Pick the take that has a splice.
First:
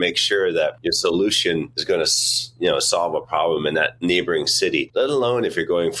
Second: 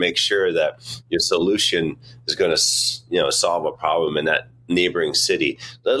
first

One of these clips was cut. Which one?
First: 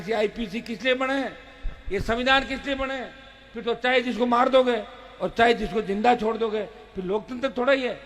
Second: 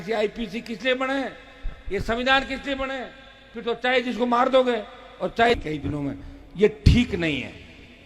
second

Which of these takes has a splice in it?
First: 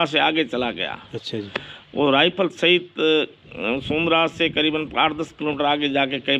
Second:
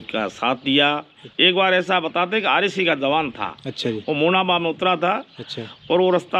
second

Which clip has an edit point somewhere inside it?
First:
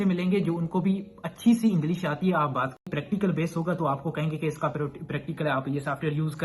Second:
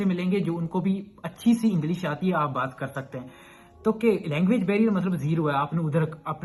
first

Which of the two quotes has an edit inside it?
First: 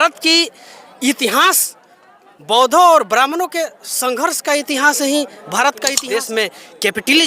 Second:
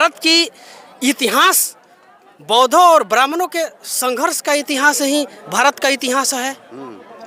first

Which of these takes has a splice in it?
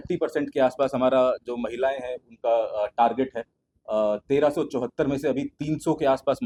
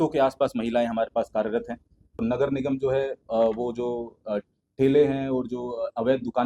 second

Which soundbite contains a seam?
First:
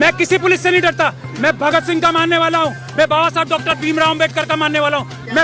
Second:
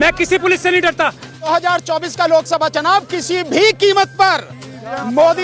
second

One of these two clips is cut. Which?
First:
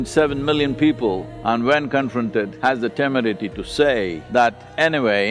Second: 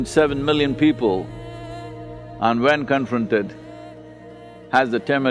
first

